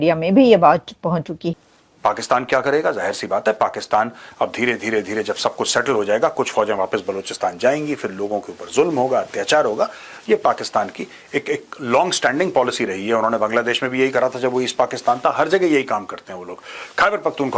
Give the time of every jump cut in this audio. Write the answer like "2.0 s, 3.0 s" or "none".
1.4 s